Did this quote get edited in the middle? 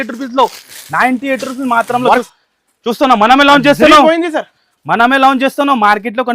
yes; 1 cut; at 2.3 s

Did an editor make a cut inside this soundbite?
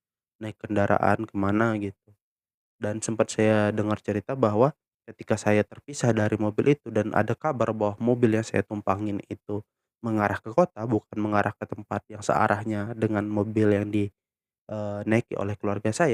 no; 0 cuts

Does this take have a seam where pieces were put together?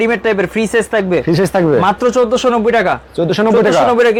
no; 0 cuts

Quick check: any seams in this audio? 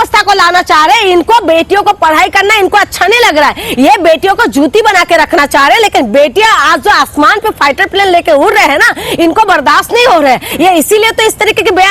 no; 0 cuts

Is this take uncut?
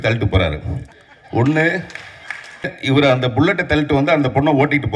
no; 1 cut; at 2.7 s

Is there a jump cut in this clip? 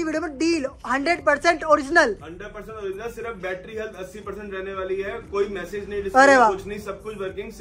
no; 0 cuts

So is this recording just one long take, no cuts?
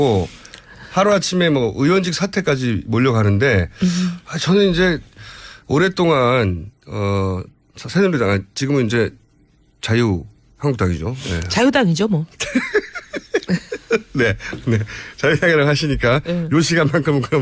no; 1 cut; at 11.6 s

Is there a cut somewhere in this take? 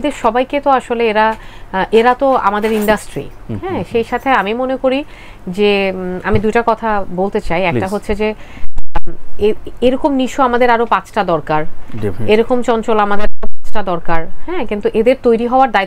no; 0 cuts

